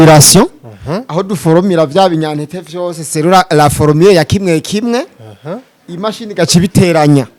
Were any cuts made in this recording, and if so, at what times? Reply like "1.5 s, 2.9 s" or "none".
none